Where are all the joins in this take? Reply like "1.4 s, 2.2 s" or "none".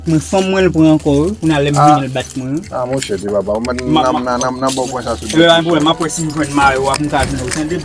none